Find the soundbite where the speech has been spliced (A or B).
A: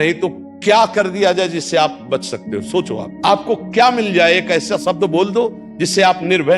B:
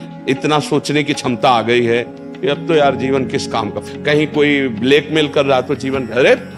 A